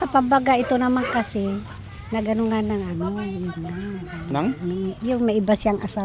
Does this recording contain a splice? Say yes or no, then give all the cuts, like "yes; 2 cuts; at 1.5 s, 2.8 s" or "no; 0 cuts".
no; 0 cuts